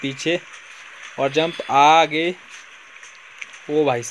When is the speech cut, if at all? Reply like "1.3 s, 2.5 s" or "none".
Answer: none